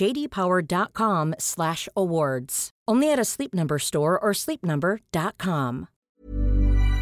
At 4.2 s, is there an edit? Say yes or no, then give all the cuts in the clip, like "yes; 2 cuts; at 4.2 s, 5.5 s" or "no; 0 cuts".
no; 1 cut; at 6.1 s